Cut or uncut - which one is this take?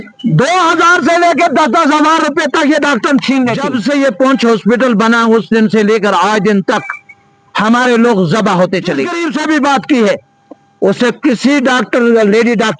cut